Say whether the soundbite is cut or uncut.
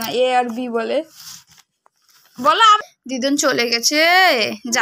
cut